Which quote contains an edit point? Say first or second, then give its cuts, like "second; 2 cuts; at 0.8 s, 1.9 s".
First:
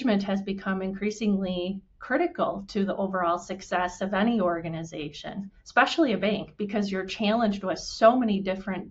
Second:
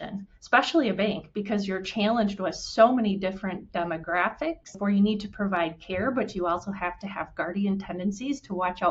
second; 1 cut; at 4.8 s